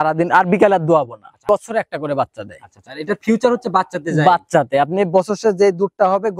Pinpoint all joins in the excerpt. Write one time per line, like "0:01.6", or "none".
0:01.5